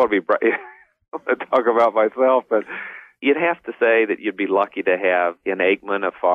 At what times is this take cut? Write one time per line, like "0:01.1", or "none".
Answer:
0:03.2
0:05.4

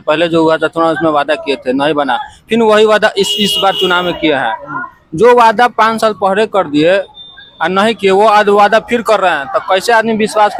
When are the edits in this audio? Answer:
none

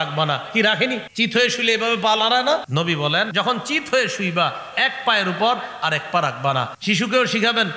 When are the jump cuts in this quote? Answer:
0:01.1
0:03.2
0:06.7

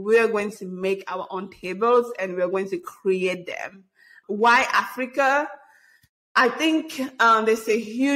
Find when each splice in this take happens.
0:04.1

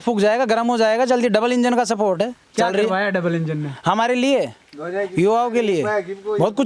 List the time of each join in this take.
none

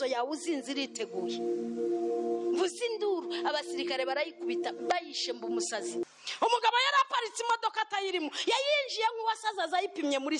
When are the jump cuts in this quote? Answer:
0:06.0

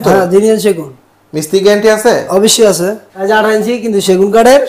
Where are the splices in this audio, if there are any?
0:03.1

